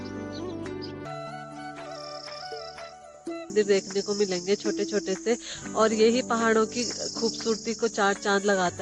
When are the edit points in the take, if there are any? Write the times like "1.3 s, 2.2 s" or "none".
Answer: 1.0 s, 3.5 s